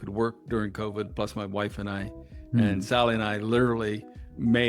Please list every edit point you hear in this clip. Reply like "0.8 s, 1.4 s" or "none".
none